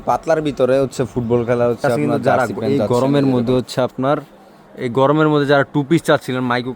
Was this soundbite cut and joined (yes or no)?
yes